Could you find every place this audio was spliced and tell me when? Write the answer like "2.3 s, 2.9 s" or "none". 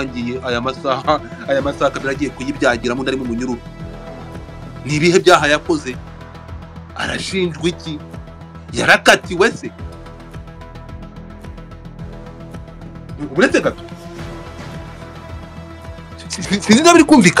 9.7 s, 13.2 s, 13.8 s, 15.8 s